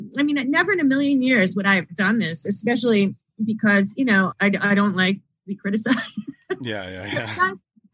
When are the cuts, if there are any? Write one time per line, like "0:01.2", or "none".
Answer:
0:04.3